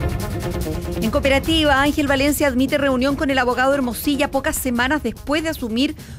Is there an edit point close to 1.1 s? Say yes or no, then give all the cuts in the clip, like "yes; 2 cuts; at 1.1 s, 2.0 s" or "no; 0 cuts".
yes; 1 cut; at 1.1 s